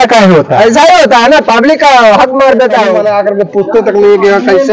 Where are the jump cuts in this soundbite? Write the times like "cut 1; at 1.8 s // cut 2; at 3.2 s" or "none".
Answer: cut 1; at 3.0 s

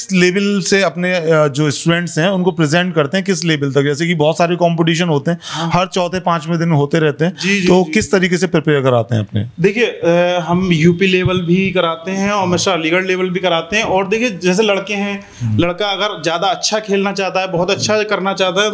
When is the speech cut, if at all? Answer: none

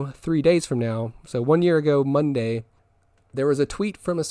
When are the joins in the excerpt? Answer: none

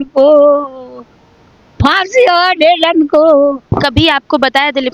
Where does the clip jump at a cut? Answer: none

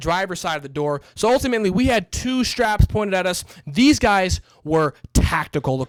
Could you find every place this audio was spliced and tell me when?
none

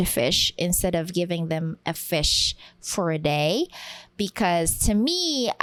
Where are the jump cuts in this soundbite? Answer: none

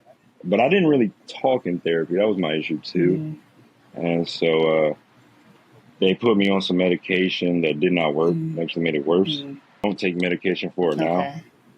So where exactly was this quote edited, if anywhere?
cut 1; at 9.8 s

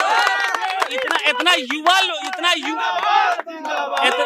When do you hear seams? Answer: none

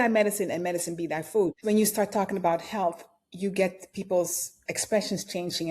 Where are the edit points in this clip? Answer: cut 1; at 1.6 s

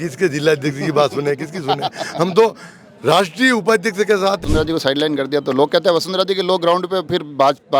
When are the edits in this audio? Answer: cut 1; at 4.4 s

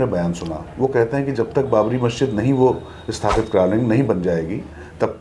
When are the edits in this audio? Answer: none

